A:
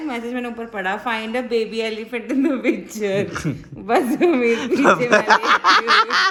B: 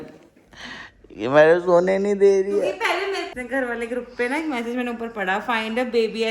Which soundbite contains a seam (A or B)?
B